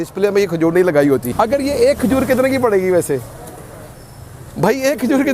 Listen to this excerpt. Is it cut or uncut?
cut